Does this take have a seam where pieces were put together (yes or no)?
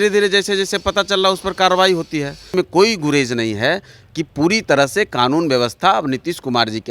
yes